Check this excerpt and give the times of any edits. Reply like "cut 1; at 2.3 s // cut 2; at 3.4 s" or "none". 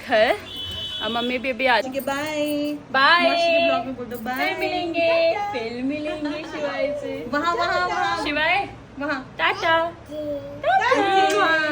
cut 1; at 1.9 s